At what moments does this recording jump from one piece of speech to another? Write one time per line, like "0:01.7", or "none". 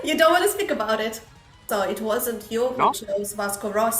0:01.6